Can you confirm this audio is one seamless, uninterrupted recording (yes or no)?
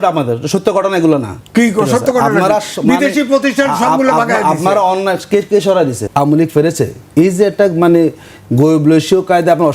no